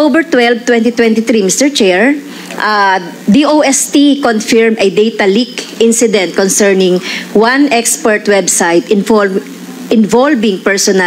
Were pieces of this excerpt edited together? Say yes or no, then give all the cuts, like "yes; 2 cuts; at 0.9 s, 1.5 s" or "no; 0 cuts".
no; 0 cuts